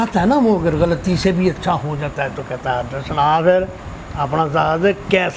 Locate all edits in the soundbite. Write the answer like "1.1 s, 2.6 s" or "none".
none